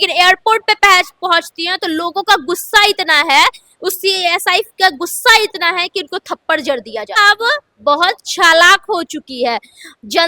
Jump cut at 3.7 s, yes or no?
no